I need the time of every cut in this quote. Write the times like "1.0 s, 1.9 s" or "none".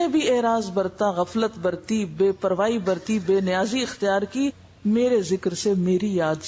none

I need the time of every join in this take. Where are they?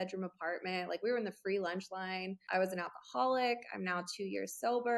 2.4 s

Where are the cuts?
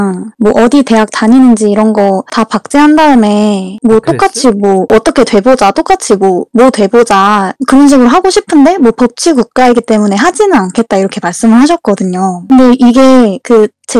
12.4 s

